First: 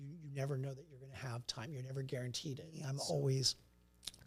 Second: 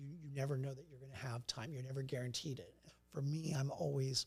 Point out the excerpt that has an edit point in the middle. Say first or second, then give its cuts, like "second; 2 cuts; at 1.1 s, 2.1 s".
first; 1 cut; at 2.9 s